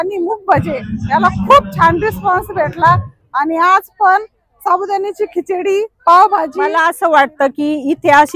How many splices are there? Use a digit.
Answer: 1